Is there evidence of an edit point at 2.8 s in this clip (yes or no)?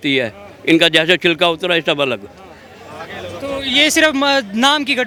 no